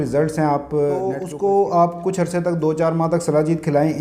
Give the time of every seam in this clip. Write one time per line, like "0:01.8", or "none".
0:01.3